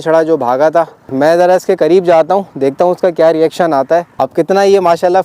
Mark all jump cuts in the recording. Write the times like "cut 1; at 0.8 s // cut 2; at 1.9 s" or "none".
cut 1; at 1.1 s // cut 2; at 4.2 s